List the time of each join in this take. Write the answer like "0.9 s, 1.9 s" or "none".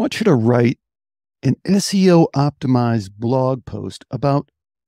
none